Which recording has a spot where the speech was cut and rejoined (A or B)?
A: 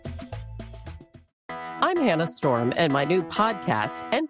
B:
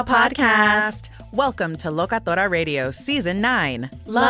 A